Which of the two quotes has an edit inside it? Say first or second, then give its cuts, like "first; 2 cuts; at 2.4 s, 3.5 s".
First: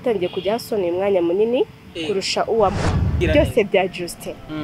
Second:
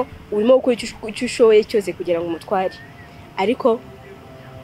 first; 1 cut; at 3.1 s